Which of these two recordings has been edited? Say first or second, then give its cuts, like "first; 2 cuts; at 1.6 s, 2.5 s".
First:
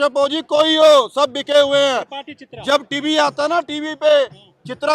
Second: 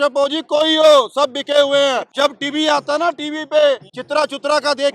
second; 2 cuts; at 2.1 s, 3.9 s